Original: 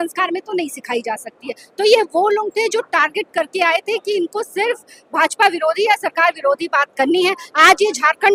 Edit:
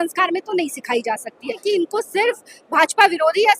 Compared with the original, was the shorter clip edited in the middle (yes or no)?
yes